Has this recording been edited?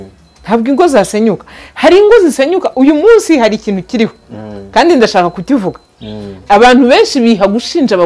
no; 0 cuts

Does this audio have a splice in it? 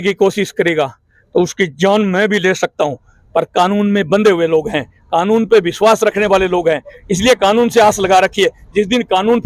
no; 0 cuts

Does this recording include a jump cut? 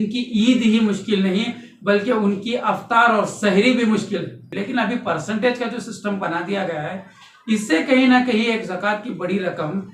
yes; 1 cut; at 4.4 s

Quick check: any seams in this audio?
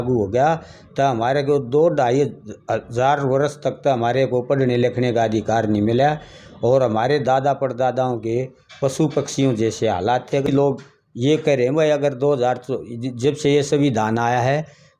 yes; 1 cut; at 10.5 s

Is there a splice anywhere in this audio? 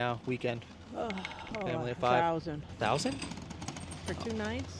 no; 0 cuts

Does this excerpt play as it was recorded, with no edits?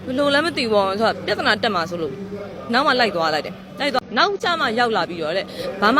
no; 1 cut; at 4.0 s

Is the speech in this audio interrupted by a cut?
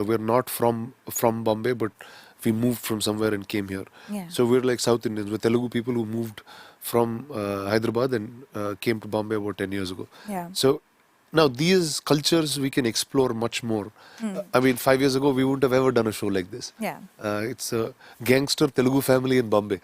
no; 0 cuts

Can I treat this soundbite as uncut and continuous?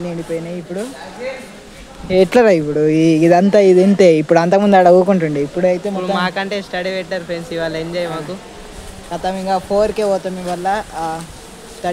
yes; 0 cuts

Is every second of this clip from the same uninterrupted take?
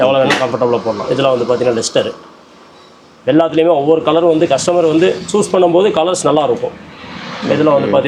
yes; 0 cuts

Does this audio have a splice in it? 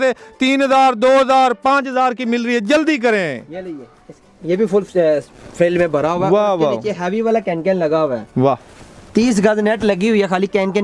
no; 0 cuts

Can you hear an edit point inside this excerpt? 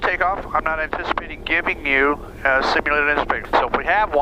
no; 0 cuts

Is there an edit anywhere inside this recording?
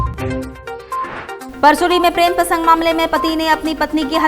yes; 1 cut; at 1.4 s

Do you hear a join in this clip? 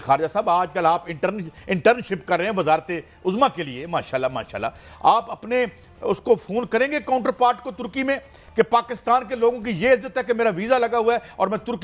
no; 0 cuts

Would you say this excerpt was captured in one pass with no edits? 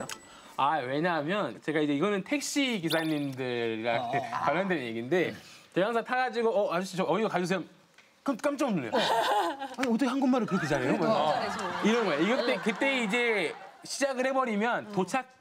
yes; 0 cuts

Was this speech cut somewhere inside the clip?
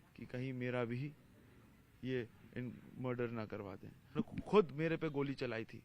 yes; 1 cut; at 4.1 s

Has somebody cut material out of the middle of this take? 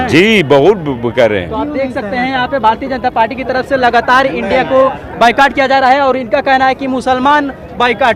no; 0 cuts

